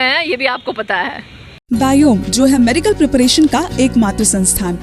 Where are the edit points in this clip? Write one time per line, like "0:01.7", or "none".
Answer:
none